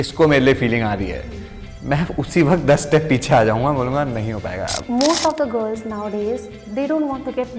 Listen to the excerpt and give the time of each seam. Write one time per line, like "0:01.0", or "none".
0:04.8